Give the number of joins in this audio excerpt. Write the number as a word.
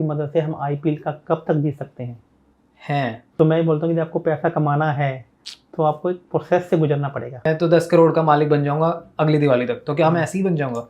two